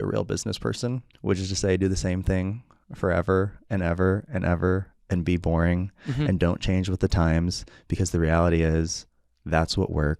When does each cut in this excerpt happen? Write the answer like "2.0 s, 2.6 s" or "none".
1.1 s